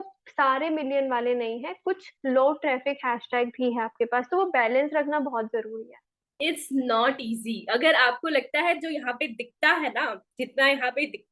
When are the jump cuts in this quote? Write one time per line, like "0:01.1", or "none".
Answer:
0:06.2